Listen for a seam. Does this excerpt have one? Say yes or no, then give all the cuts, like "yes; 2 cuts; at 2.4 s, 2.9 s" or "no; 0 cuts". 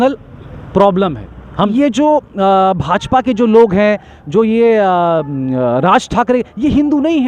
yes; 1 cut; at 1.7 s